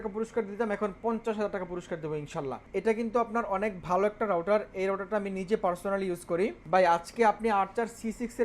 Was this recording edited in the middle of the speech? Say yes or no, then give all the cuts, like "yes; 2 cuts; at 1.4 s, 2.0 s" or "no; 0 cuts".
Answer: yes; 2 cuts; at 2.6 s, 6.6 s